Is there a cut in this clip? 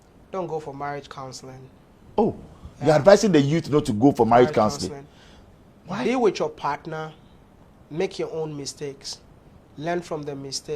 no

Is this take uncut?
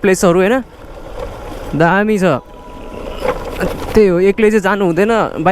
yes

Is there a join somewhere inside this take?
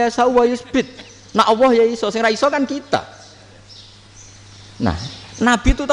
no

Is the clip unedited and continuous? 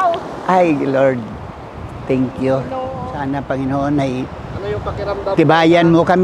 no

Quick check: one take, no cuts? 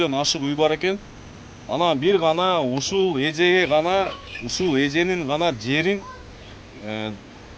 yes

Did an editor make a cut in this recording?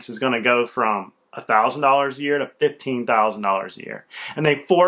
no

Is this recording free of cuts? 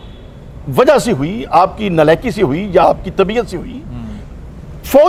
yes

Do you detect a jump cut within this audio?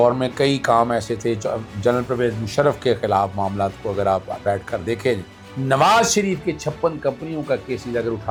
no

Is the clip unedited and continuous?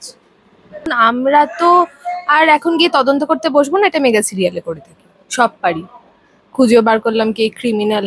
no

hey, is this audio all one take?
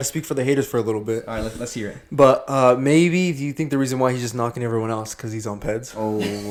yes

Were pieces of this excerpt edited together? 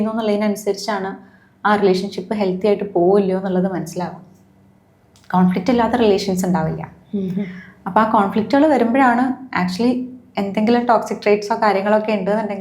no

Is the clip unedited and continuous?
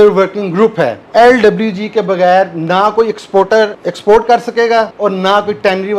no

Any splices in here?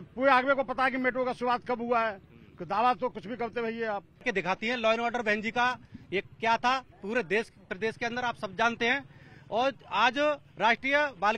yes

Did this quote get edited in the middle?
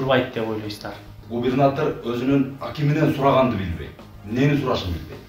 yes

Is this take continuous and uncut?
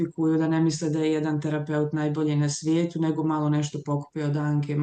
yes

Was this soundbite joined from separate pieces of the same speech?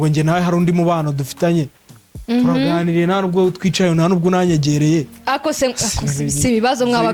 no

